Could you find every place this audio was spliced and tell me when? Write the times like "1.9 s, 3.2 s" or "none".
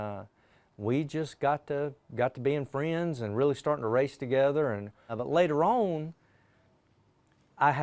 5.1 s